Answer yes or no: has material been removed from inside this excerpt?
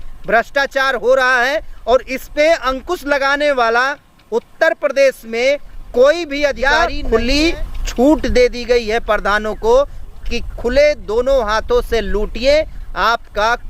yes